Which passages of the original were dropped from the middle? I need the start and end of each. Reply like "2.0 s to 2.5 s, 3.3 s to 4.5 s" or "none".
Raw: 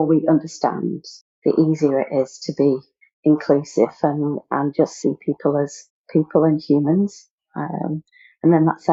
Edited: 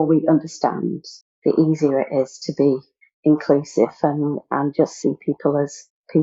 none